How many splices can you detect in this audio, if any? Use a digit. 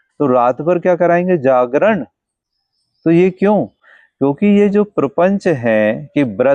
0